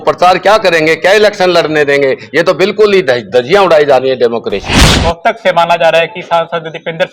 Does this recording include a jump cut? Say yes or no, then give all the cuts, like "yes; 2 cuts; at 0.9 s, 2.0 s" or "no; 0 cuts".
yes; 1 cut; at 4.9 s